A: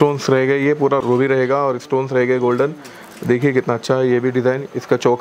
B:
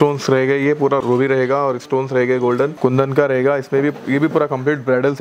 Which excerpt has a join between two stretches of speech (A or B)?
B